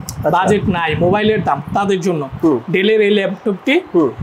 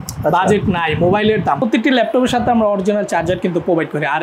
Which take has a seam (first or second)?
second